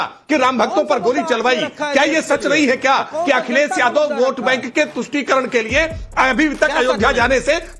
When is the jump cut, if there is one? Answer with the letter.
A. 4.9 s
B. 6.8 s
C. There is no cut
C